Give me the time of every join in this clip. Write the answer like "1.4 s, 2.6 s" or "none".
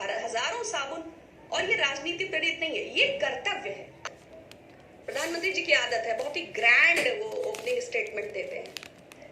4.1 s

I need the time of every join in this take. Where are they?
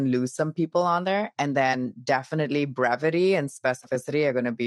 none

